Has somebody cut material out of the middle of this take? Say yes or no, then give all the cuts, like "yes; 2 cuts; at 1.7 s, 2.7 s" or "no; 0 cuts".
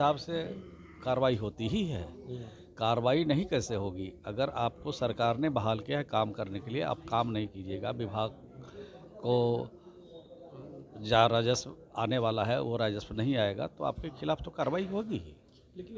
no; 0 cuts